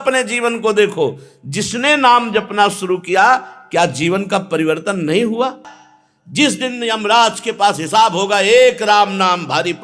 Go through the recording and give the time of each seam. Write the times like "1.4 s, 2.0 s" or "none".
5.6 s